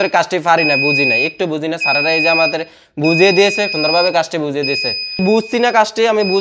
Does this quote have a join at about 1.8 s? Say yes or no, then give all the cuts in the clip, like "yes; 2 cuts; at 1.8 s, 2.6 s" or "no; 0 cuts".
no; 2 cuts; at 3.7 s, 5.2 s